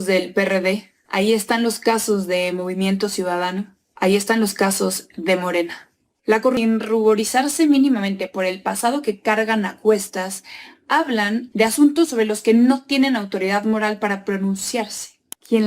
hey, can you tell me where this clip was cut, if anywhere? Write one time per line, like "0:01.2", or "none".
0:06.6

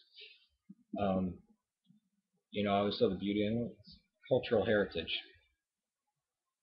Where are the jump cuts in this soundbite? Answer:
none

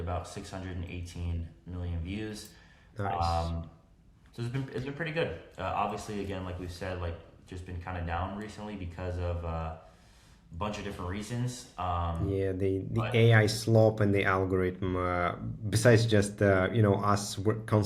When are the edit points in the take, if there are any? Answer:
none

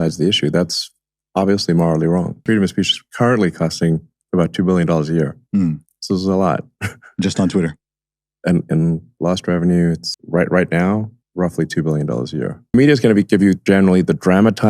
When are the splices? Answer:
0:02.3

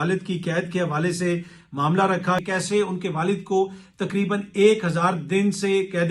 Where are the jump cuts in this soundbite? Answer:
0:02.4

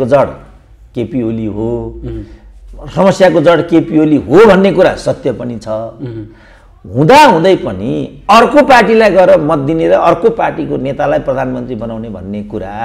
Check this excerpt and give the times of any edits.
none

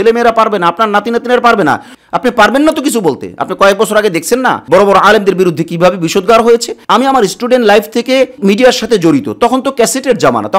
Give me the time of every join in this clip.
0:01.9
0:06.8

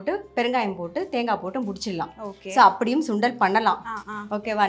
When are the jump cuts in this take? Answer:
none

